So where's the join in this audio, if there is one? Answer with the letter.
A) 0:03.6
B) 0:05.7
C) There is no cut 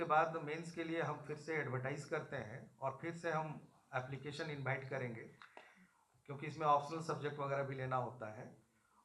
C